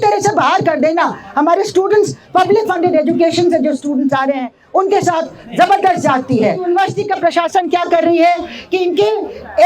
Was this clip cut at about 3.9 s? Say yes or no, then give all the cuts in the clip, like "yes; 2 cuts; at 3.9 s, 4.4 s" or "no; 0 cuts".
no; 1 cut; at 6.6 s